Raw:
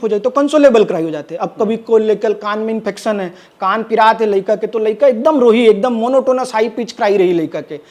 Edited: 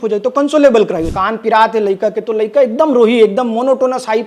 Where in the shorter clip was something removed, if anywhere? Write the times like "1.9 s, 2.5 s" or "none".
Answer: 1.1 s